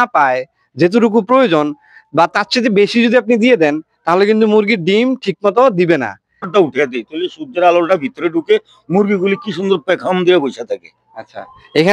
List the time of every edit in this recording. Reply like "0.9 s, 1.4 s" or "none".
6.5 s